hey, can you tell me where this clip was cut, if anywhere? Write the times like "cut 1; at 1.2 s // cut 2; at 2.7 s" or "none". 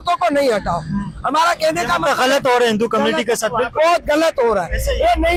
none